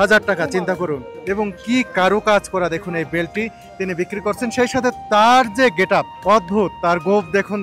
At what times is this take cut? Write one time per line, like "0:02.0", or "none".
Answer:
0:01.1
0:06.1